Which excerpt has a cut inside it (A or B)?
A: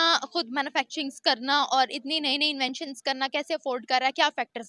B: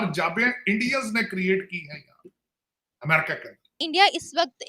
B